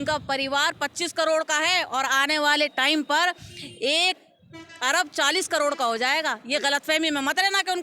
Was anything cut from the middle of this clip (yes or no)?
no